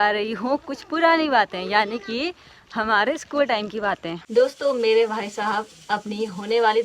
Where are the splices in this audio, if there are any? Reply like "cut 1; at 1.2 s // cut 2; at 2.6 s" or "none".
cut 1; at 4.1 s